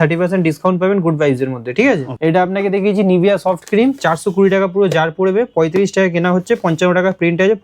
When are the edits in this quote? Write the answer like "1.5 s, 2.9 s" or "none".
2.1 s